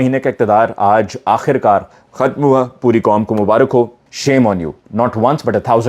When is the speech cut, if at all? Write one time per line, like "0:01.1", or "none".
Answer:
0:04.0